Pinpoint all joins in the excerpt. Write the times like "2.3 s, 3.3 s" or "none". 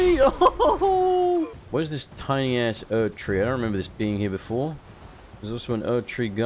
1.6 s